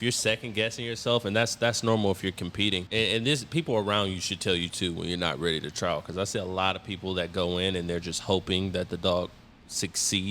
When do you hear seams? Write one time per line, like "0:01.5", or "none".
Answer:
0:02.8

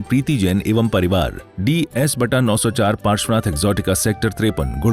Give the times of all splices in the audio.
0:01.4

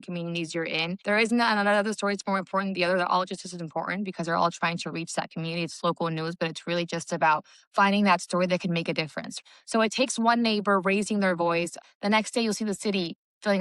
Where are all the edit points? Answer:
0:01.0
0:09.4
0:11.7

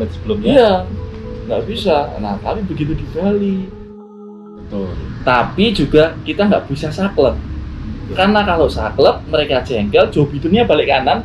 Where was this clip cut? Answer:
0:04.1

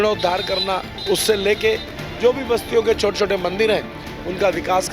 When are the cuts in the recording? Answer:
0:00.9

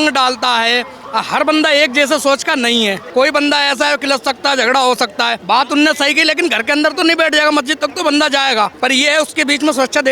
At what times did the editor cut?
0:03.0
0:05.4

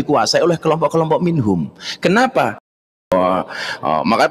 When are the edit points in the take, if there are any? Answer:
0:03.1

